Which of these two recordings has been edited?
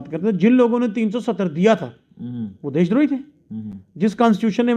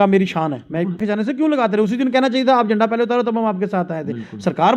second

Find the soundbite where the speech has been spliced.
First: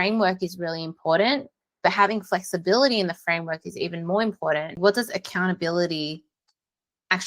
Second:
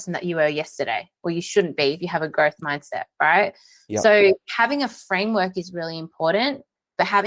first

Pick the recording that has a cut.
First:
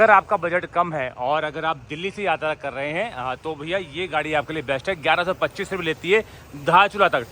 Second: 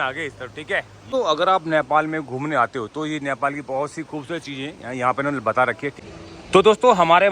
second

